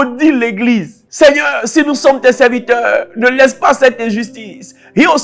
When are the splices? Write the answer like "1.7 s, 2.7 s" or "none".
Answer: 1.0 s